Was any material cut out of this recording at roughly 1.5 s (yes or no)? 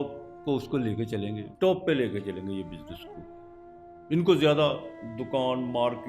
yes